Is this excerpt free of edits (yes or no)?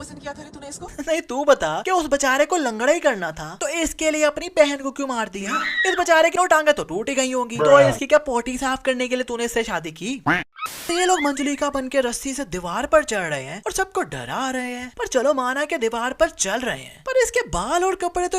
no